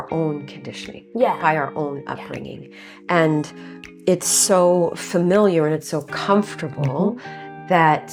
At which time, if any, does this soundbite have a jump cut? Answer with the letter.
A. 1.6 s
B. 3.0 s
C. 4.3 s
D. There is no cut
D